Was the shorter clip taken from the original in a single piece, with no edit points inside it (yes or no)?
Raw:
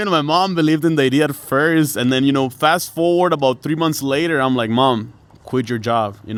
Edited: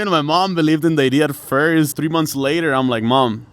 no